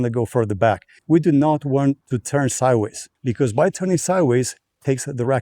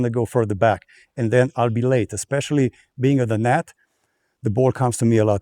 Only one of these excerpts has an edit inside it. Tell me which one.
first; 3 cuts; at 1.0 s, 2.1 s, 3.1 s

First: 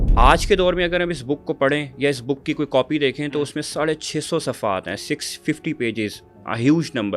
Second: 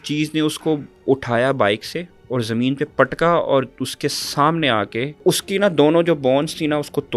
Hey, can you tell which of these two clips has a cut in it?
second; 2 cuts; at 2.1 s, 5.2 s

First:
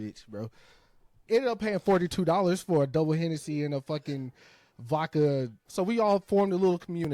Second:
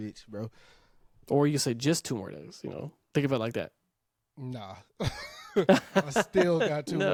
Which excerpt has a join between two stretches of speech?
first; 2 cuts; at 1.2 s, 5.6 s

